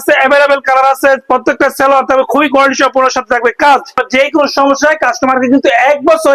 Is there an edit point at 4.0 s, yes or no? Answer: yes